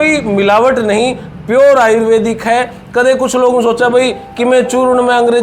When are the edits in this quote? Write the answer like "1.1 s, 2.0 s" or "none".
none